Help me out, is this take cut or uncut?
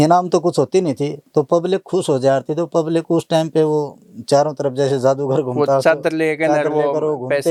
uncut